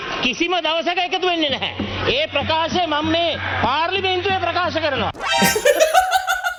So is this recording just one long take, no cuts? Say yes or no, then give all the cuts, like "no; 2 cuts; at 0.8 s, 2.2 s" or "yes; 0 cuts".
yes; 0 cuts